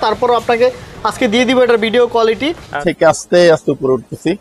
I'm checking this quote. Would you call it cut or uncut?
cut